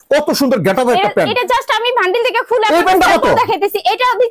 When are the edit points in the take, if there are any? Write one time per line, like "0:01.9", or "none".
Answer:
none

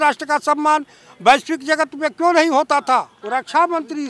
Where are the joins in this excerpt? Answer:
0:03.2

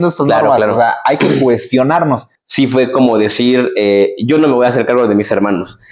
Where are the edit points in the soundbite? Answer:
0:02.4

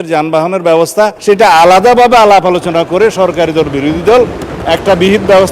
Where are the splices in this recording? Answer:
0:01.2

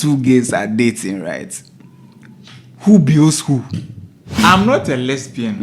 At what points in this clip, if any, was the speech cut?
0:04.4

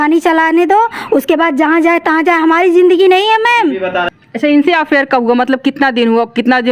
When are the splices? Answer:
0:04.1

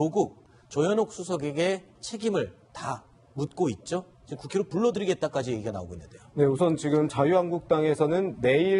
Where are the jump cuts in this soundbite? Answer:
0:07.0

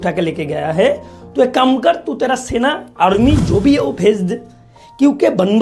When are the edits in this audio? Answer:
none

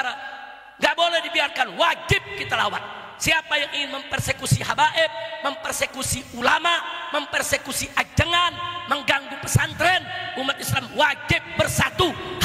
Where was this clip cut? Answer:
none

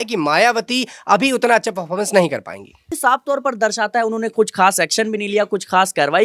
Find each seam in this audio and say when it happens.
0:03.0

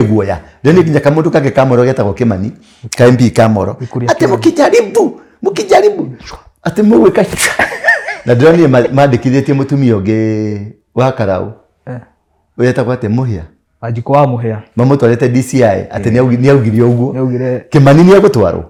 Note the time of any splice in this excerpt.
none

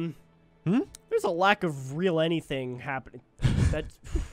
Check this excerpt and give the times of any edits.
none

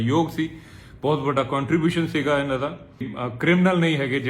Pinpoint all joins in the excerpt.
0:03.2

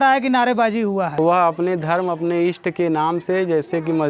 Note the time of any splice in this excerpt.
0:01.1

